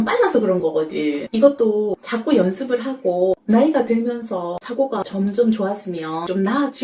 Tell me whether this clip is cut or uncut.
uncut